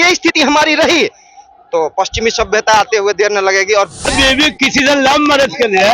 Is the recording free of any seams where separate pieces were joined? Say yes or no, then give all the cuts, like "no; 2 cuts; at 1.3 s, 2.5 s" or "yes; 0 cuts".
no; 1 cut; at 4.1 s